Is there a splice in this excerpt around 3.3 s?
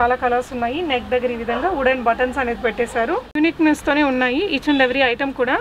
yes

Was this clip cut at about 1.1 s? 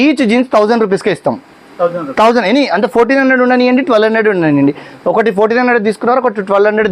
no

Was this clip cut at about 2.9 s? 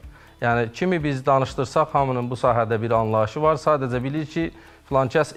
no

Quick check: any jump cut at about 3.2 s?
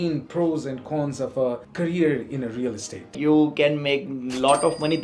yes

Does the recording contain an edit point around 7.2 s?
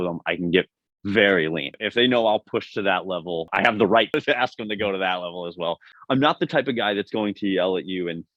no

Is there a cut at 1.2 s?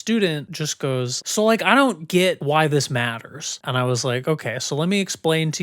yes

